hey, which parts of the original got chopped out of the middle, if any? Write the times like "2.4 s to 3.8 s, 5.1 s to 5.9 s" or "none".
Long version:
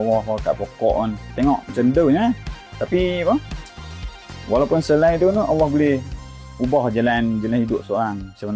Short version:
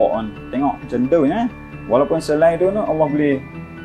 2.5 s to 4.3 s